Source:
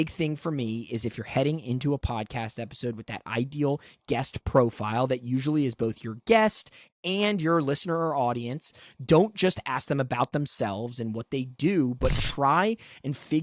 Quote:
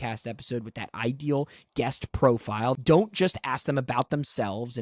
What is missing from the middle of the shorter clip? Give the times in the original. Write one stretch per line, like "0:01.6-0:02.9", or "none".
0:05.1-0:09.0

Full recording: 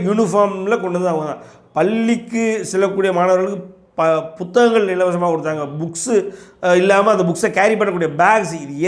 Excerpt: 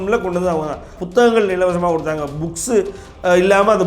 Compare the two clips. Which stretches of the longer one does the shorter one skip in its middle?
0:01.6-0:04.4

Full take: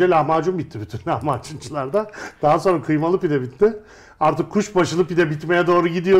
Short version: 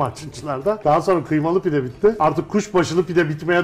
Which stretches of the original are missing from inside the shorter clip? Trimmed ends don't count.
0:02.1-0:02.4
0:03.7-0:04.2

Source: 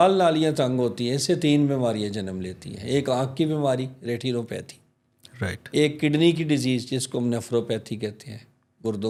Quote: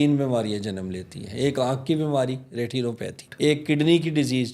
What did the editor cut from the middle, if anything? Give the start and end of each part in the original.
0:04.7-0:05.6

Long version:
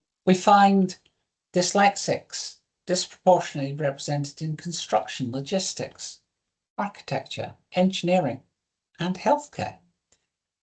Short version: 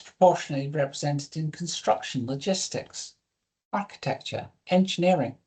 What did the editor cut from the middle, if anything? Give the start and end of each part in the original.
none

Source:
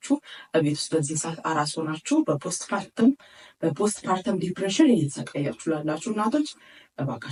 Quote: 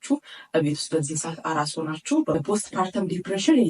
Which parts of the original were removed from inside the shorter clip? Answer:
0:02.3-0:03.7

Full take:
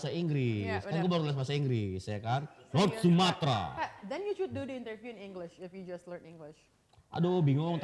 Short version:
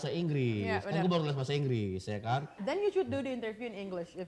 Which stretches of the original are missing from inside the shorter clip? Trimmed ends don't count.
0:02.6-0:04.0

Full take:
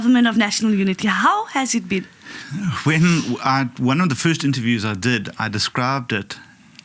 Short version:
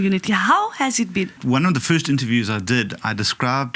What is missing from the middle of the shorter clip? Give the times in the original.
0:02.1-0:03.7

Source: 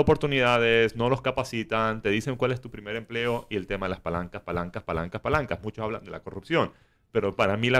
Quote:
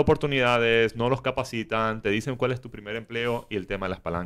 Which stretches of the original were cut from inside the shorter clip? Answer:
none

